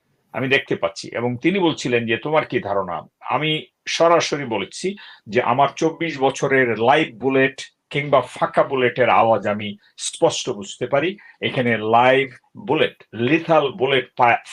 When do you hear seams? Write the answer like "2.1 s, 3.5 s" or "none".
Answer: none